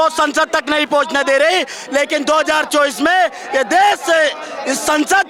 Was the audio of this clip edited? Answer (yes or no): no